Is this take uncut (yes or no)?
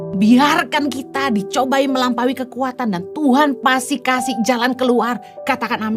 yes